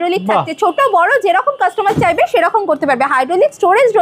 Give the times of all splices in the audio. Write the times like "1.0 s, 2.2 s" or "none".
none